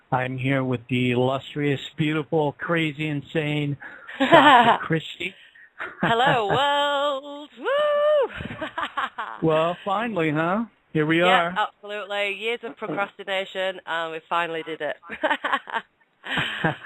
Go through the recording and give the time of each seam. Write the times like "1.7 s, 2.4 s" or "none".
none